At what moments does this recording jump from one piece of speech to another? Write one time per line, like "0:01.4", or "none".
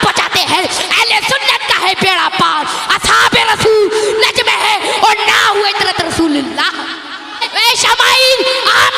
0:07.5